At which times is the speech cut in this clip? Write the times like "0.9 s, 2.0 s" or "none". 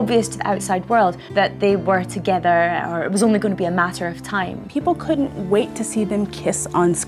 1.2 s, 4.6 s